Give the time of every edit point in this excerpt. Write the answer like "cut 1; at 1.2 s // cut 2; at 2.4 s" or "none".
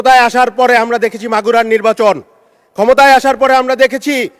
none